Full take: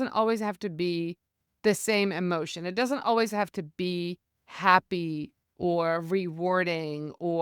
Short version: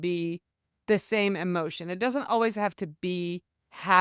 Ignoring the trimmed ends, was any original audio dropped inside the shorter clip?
no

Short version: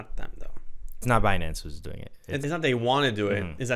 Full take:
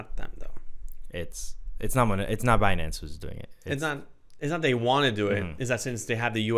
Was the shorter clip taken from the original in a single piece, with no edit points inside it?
no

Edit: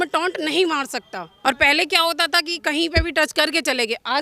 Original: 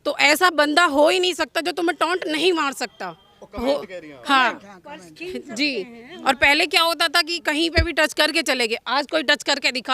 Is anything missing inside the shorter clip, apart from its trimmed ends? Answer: yes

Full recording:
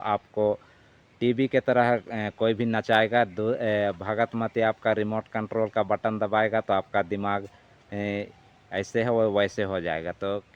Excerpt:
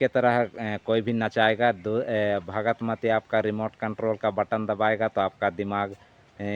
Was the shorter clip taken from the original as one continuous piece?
yes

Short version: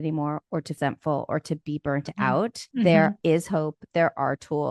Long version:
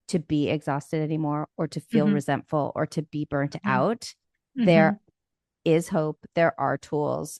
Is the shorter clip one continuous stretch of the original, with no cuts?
no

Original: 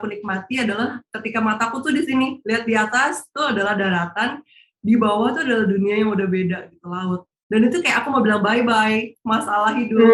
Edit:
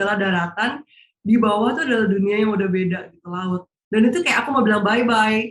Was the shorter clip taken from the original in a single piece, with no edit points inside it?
yes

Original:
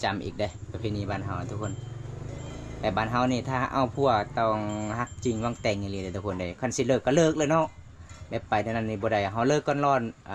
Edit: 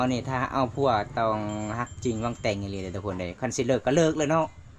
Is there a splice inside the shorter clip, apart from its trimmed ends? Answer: no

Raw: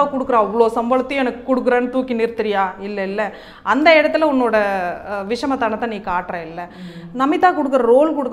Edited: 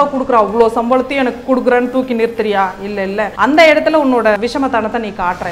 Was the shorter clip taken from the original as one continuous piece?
no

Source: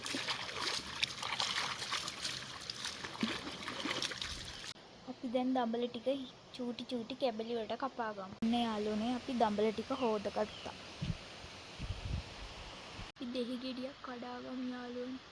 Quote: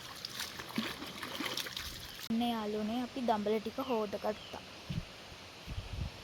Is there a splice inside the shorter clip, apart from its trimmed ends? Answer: yes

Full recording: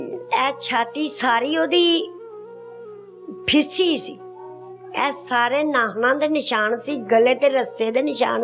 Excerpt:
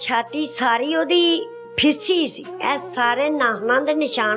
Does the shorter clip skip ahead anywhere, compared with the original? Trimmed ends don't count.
yes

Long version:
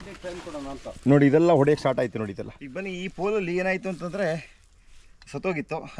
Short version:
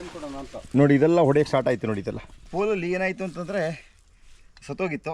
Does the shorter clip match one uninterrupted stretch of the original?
no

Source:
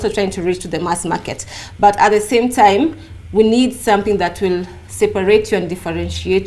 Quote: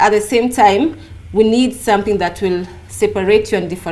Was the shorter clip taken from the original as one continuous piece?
yes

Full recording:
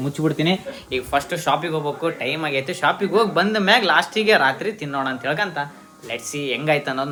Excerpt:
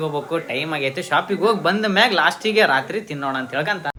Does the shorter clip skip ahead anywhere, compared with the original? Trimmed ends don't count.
no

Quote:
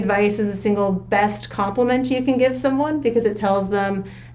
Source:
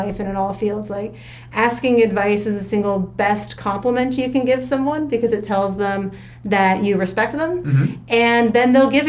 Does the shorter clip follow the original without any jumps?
yes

